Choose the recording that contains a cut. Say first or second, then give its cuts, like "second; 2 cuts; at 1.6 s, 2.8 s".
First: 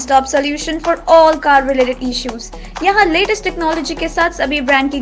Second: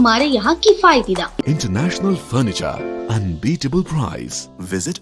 second; 1 cut; at 1.4 s